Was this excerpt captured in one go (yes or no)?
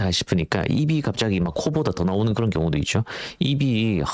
yes